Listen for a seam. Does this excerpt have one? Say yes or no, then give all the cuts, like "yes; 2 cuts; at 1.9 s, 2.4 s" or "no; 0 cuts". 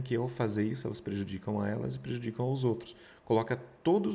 no; 0 cuts